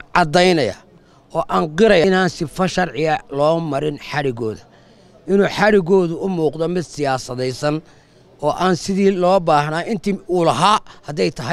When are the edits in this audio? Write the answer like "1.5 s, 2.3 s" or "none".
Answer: 2.0 s